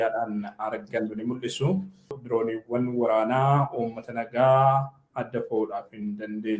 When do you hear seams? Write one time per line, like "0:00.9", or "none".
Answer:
0:02.2